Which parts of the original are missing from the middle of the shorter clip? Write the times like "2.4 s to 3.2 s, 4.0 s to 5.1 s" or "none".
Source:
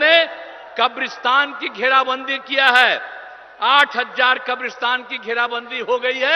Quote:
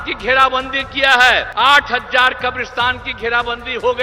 3.0 s to 3.5 s